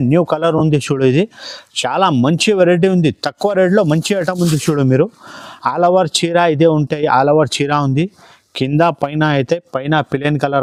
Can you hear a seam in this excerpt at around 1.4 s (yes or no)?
no